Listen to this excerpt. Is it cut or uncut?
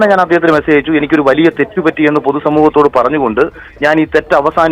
uncut